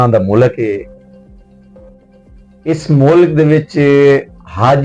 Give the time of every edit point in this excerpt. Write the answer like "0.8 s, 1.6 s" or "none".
0.9 s, 2.5 s